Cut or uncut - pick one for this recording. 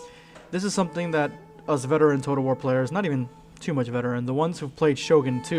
uncut